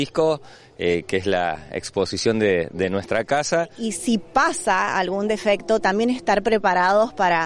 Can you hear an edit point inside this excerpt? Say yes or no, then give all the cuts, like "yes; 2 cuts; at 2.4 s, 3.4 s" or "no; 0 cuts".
yes; 1 cut; at 3.8 s